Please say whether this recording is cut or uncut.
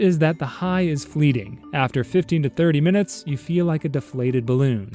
uncut